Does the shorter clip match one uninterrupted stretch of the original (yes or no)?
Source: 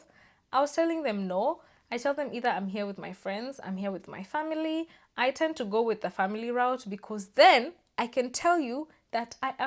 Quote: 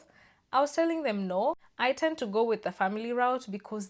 no